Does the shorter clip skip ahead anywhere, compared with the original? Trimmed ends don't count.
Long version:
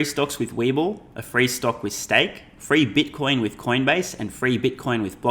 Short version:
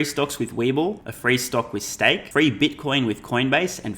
yes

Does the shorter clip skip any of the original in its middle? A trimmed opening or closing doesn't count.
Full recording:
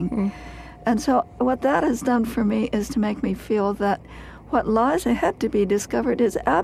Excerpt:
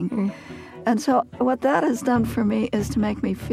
no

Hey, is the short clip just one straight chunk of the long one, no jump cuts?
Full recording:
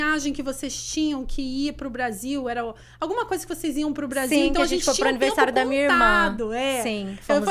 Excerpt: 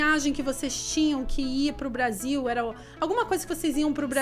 yes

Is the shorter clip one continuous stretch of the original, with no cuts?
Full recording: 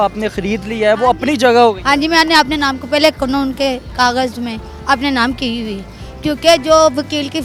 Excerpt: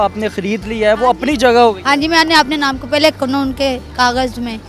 yes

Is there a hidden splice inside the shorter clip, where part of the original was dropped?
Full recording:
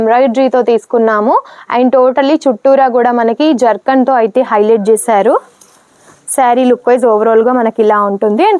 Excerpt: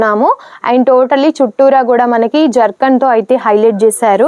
no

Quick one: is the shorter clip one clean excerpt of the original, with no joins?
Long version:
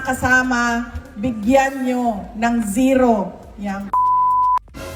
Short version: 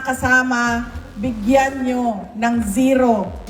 yes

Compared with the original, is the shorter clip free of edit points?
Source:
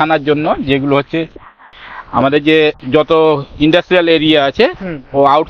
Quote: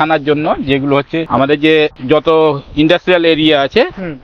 no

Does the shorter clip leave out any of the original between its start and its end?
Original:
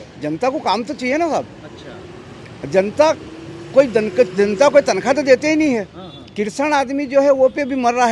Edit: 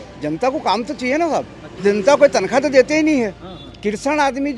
yes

